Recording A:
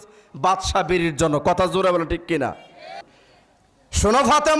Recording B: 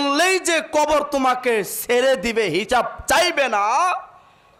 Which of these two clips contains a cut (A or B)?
A